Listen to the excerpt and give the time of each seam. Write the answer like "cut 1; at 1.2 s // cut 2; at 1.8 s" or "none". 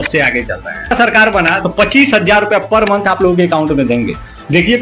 cut 1; at 0.9 s

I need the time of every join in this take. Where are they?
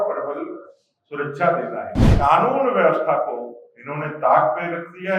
cut 1; at 2.1 s

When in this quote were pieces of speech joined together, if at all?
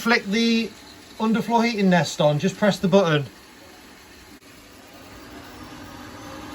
cut 1; at 4.4 s

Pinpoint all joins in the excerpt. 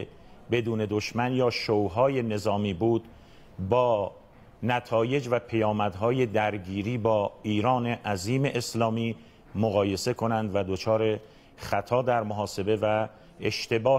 cut 1; at 7.4 s

